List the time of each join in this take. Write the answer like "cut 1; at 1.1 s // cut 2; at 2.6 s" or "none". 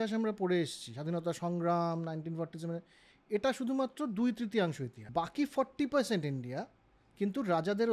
cut 1; at 4.9 s